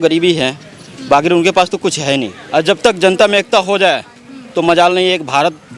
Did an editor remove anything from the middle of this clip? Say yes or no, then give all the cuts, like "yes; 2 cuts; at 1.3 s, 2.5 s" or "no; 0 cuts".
yes; 1 cut; at 2.4 s